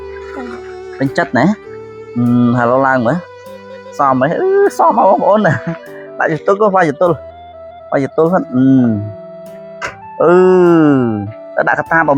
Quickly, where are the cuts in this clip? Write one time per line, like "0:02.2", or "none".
none

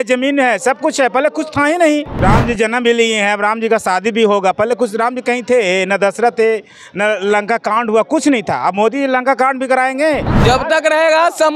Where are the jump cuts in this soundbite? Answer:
0:02.1
0:10.3

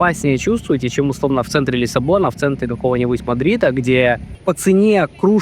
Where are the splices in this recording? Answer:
0:04.3

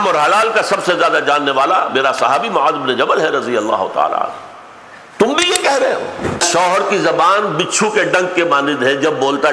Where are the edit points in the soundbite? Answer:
0:06.5

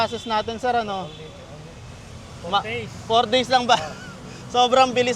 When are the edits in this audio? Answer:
none

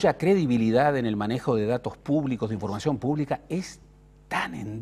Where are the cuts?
none

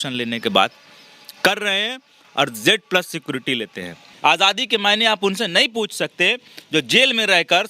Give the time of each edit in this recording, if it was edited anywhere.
0:04.0

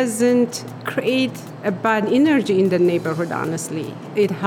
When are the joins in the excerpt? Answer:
0:01.0

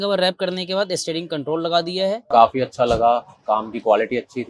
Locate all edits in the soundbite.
0:02.2

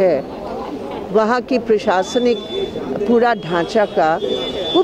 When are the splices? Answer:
none

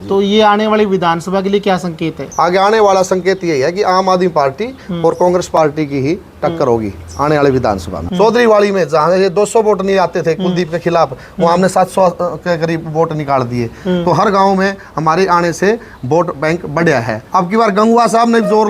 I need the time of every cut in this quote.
0:02.2
0:08.0
0:17.2

